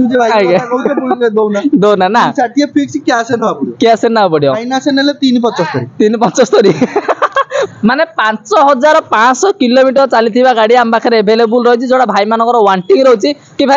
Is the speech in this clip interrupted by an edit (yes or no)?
yes